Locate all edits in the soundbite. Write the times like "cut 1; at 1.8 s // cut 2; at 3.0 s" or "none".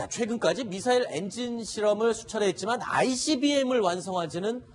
cut 1; at 2.3 s